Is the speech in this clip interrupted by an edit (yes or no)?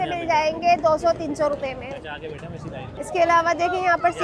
no